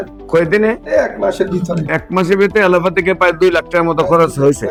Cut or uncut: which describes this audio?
uncut